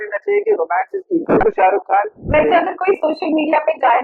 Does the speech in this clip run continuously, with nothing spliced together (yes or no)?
no